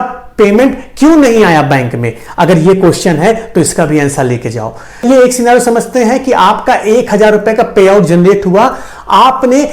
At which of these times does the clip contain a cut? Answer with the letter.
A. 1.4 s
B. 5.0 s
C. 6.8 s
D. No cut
B